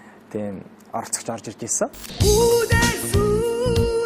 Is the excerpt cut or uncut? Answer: uncut